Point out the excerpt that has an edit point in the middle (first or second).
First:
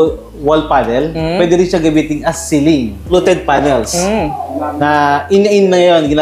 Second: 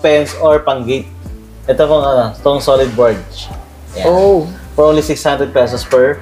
first